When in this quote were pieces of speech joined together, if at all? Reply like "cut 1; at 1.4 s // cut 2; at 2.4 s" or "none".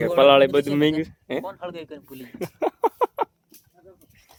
none

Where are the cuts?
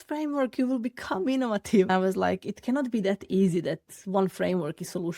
cut 1; at 1.9 s

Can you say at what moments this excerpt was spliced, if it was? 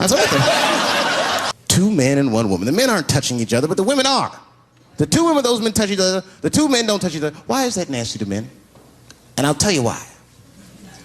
cut 1; at 1.5 s

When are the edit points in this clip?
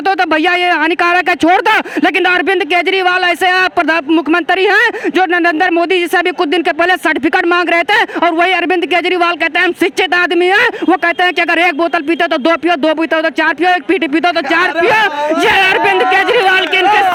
none

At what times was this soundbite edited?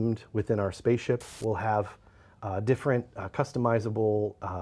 cut 1; at 1.3 s

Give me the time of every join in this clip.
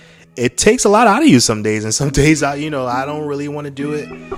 none

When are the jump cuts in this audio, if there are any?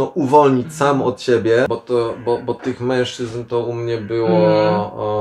cut 1; at 1.8 s

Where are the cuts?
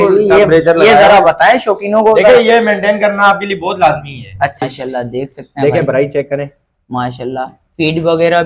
cut 1; at 4.6 s

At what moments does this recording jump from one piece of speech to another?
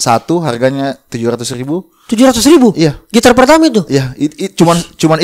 none

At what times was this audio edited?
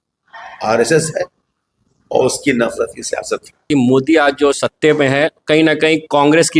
cut 1; at 3.6 s

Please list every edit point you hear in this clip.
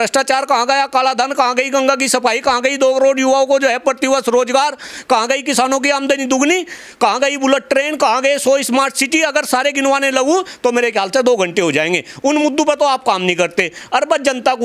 none

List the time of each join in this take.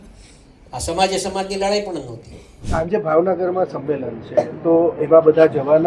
cut 1; at 2.5 s

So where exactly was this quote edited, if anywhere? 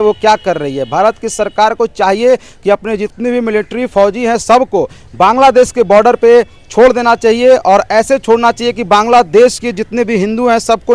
none

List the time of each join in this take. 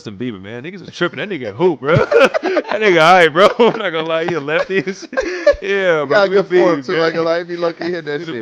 none

